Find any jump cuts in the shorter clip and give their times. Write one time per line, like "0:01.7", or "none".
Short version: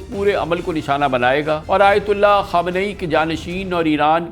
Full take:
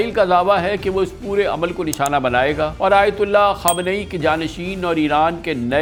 none